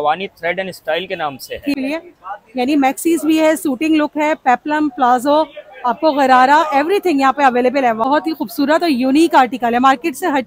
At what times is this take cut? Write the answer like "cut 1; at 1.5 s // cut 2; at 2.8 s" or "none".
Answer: cut 1; at 1.7 s // cut 2; at 8.0 s